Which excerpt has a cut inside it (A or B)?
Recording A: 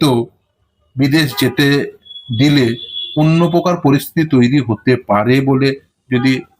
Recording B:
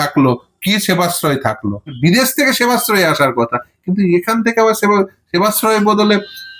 B